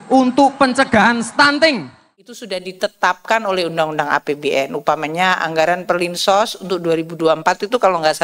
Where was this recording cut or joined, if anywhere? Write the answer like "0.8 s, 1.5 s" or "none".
2.4 s